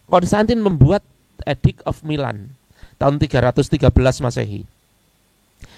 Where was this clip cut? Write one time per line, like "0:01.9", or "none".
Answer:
none